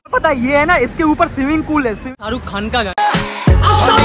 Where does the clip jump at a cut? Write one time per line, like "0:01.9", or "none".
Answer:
0:02.1